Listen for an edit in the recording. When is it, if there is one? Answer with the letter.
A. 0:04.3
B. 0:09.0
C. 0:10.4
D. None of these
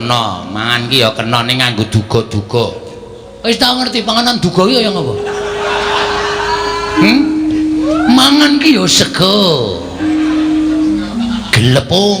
B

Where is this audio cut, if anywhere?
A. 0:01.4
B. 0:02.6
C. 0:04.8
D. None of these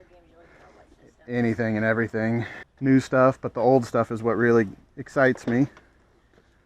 B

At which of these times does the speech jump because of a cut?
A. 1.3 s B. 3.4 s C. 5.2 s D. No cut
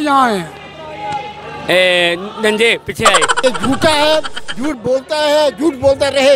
B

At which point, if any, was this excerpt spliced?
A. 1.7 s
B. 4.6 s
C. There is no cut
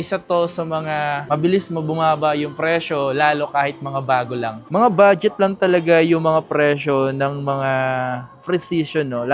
B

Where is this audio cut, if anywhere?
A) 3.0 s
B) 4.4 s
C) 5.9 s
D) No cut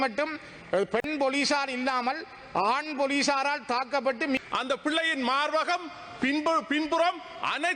B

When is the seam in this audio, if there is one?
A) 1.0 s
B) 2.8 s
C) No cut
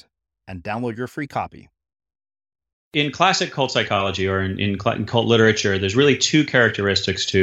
B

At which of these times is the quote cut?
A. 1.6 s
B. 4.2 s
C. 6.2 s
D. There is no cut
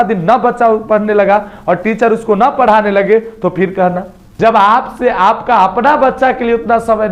B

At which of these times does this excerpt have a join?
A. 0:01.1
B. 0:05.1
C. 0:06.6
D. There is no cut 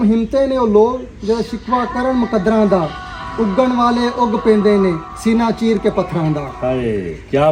D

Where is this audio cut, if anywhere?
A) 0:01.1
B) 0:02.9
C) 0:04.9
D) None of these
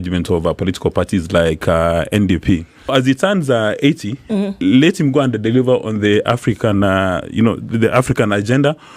B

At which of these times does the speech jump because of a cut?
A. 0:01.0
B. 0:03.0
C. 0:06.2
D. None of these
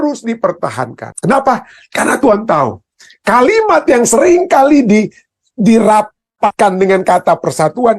A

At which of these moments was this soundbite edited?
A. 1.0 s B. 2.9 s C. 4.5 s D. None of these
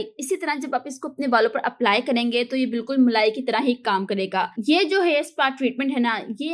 C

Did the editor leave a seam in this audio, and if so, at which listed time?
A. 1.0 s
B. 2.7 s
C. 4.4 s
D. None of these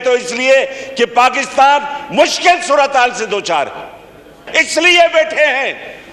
C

